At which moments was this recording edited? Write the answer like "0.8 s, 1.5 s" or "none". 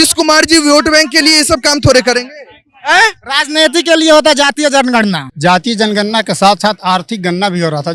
5.2 s